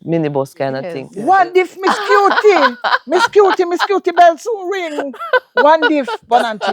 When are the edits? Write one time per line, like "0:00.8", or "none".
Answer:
0:01.0